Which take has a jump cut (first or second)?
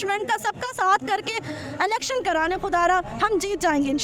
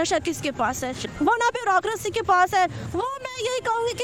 second